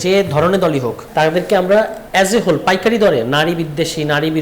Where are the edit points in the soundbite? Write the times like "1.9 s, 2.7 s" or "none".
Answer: 1.0 s, 2.0 s